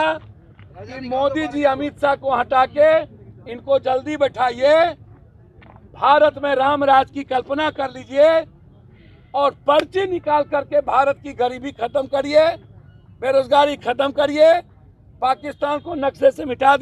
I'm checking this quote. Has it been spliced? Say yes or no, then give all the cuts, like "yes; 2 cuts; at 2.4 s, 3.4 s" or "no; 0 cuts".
no; 0 cuts